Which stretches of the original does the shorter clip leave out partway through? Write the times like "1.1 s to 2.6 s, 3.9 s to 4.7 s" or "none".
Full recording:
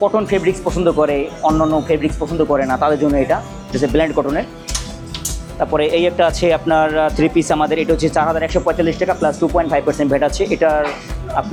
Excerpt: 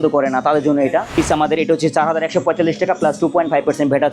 3.5 s to 7.3 s